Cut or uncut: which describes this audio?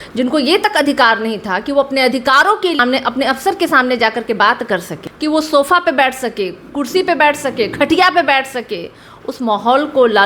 cut